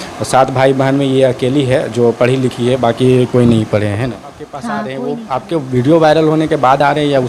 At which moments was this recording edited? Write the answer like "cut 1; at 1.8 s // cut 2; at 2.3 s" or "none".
cut 1; at 4.8 s